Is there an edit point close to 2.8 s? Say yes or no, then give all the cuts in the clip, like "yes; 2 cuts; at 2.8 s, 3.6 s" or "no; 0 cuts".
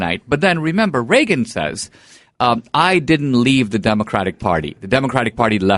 no; 0 cuts